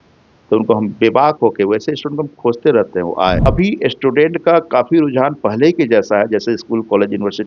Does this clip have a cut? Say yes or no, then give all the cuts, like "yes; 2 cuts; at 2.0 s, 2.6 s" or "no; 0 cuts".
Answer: yes; 1 cut; at 3.5 s